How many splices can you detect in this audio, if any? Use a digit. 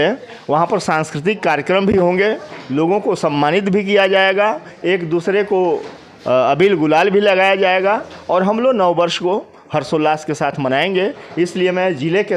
0